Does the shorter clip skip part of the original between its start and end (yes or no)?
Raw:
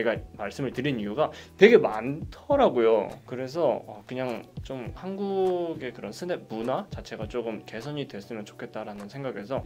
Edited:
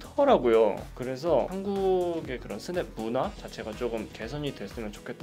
yes